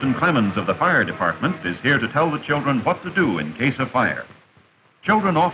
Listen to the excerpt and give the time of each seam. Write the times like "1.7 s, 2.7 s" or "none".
2.6 s

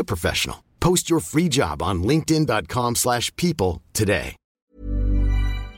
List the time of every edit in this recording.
4.7 s

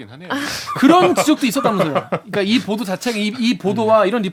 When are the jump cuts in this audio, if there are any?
none

